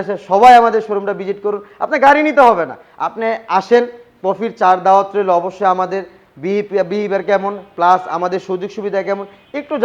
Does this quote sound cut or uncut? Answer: uncut